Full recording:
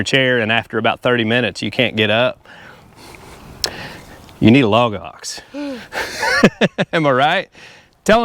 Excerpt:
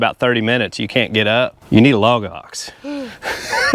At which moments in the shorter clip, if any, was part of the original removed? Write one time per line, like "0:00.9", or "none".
0:01.6